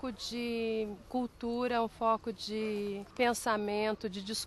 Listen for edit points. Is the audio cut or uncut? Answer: cut